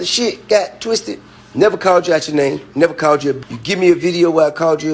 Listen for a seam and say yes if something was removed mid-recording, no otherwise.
yes